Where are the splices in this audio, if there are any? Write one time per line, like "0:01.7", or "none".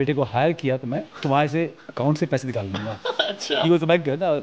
0:01.1